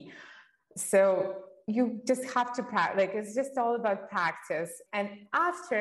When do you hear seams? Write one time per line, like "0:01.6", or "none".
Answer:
0:04.8